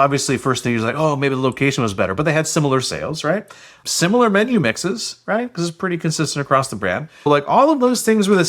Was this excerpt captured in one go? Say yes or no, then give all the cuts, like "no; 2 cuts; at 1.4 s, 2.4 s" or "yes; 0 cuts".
no; 1 cut; at 7.3 s